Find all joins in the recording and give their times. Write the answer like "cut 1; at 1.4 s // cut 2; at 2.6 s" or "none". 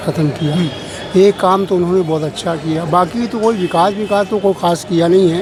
none